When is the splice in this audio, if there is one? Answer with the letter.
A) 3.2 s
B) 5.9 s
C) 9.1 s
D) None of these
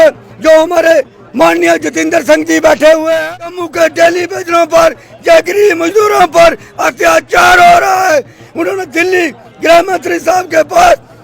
A